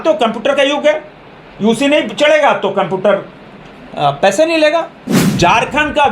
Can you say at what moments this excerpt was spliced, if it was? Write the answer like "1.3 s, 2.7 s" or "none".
5.2 s